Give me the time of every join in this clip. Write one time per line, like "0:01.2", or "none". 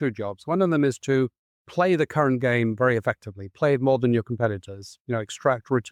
none